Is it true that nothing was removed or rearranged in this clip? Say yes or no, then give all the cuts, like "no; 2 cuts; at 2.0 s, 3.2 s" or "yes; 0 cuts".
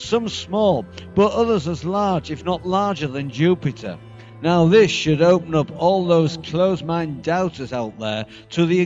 yes; 0 cuts